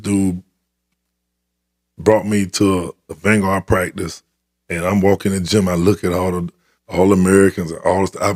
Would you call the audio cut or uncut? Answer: uncut